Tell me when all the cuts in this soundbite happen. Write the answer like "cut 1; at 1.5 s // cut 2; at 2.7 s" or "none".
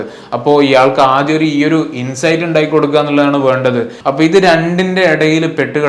cut 1; at 3.9 s